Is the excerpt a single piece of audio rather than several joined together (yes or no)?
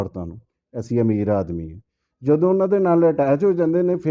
yes